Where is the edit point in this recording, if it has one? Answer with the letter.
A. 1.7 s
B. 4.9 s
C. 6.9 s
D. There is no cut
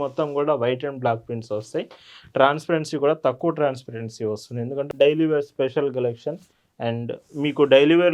B